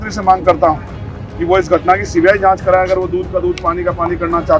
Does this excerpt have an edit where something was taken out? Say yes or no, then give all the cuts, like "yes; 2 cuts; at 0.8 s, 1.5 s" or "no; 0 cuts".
no; 0 cuts